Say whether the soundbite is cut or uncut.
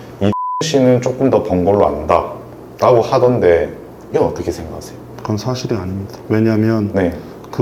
cut